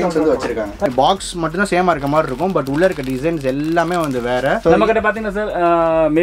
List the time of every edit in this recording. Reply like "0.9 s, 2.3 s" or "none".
0.9 s, 4.6 s